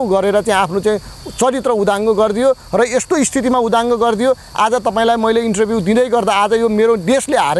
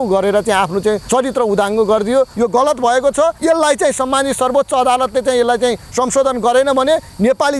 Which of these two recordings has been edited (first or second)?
second